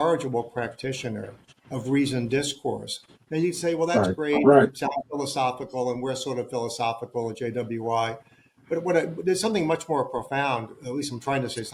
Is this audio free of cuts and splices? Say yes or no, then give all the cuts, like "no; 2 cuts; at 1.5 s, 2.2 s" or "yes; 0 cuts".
yes; 0 cuts